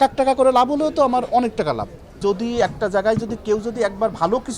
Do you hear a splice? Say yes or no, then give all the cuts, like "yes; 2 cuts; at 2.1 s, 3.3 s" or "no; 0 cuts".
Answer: yes; 1 cut; at 2.2 s